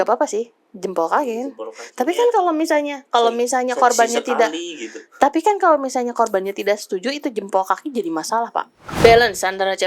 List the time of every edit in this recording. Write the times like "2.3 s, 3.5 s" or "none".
8.8 s